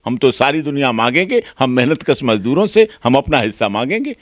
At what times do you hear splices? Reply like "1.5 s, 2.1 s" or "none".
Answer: none